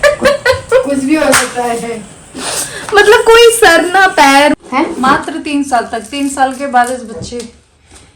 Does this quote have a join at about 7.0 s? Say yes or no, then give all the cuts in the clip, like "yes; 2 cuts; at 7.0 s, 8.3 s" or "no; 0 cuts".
no; 1 cut; at 4.6 s